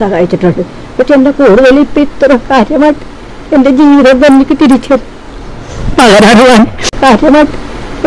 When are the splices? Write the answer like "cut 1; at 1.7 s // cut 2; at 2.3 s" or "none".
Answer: cut 1; at 7.0 s